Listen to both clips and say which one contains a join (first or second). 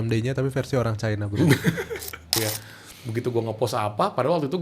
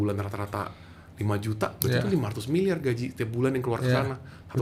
first